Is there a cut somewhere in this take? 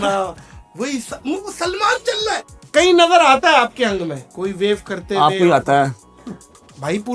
yes; 2 cuts; at 2.5 s, 4.2 s

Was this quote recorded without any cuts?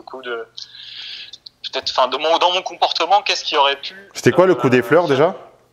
yes; 0 cuts

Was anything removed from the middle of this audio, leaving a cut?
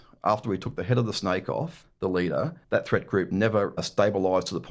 yes; 3 cuts; at 1.8 s, 2.6 s, 3.8 s

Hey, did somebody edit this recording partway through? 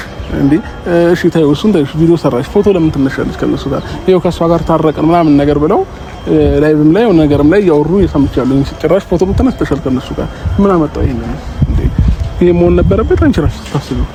no; 0 cuts

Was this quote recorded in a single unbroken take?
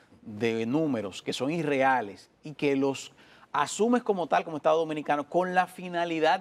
yes; 0 cuts

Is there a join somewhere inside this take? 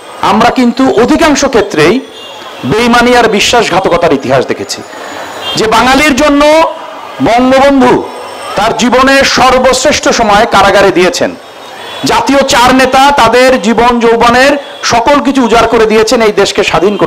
no; 0 cuts

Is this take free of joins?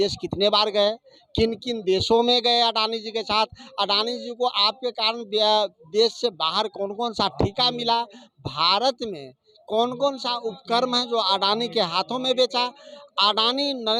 yes; 0 cuts

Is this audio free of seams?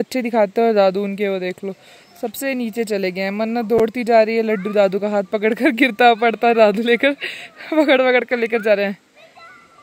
yes; 0 cuts

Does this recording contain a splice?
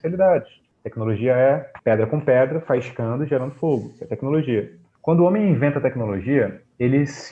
yes; 1 cut; at 4.9 s

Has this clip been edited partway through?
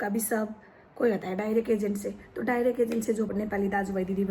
yes; 1 cut; at 3.3 s

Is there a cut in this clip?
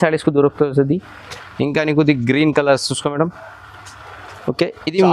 no; 0 cuts

